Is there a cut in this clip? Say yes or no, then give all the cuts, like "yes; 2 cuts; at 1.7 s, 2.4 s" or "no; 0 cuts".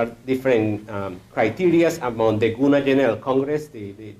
no; 0 cuts